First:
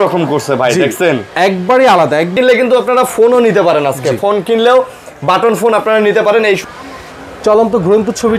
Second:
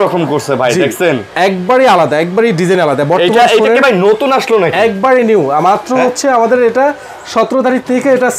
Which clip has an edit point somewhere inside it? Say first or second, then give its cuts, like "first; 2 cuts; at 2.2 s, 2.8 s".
first; 2 cuts; at 2.3 s, 6.6 s